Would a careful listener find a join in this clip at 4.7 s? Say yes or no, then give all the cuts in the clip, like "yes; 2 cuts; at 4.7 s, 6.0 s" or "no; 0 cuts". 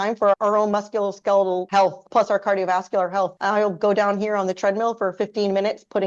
no; 2 cuts; at 1.6 s, 3.4 s